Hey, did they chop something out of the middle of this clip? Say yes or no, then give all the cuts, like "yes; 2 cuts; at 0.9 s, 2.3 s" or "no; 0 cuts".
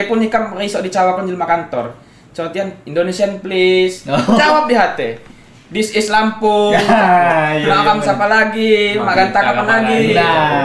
no; 0 cuts